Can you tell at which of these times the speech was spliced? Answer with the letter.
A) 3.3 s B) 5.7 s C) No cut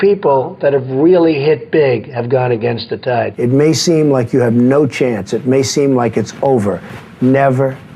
A